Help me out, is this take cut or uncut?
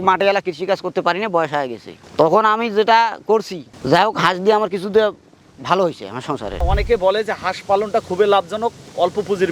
cut